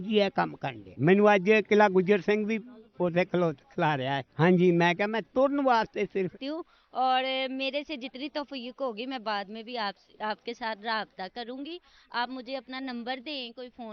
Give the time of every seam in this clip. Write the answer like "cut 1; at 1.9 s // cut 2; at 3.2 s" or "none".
cut 1; at 6.3 s